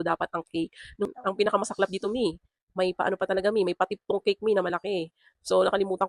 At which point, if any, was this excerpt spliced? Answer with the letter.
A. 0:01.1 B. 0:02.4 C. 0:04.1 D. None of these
A